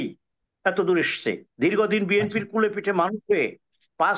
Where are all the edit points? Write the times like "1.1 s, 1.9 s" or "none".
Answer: 1.5 s